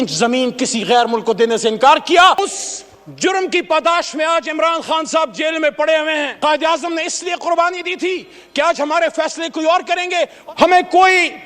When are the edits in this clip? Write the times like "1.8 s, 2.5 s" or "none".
2.5 s, 6.3 s, 10.4 s

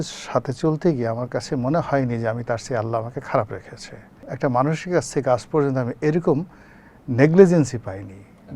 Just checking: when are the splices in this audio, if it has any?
4.2 s

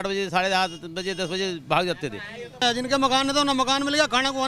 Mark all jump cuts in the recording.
2.6 s

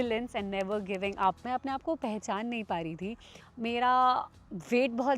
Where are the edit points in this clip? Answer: 1.4 s

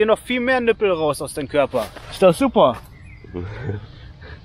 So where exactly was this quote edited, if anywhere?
none

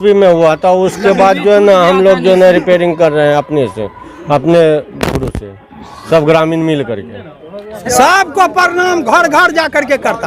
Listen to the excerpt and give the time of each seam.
7.8 s

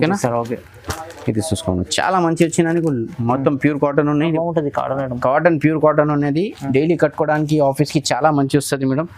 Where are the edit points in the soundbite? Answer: 4.2 s

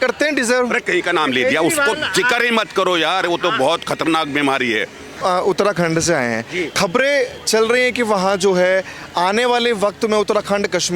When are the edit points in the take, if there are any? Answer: 5.2 s

